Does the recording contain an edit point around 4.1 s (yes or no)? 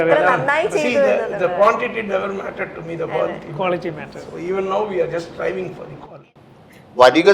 no